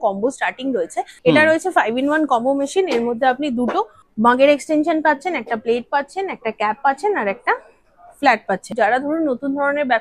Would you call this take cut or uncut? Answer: cut